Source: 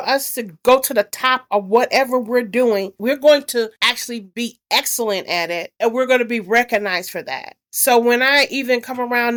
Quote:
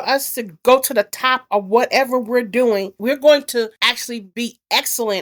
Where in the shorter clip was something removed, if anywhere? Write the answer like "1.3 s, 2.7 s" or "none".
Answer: none